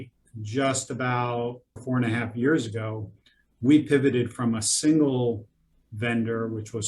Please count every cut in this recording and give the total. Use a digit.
1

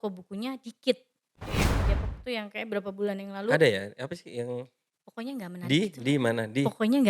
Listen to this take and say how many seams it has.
1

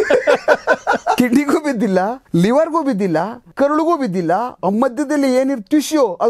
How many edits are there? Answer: 3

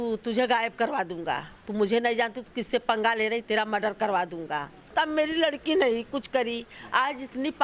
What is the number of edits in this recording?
1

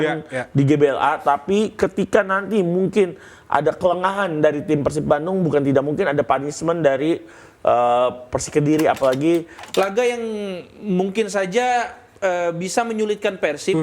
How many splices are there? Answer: 1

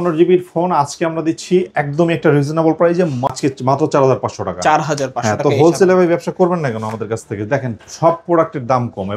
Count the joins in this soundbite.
1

